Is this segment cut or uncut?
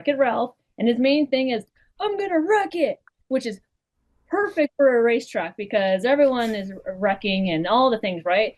uncut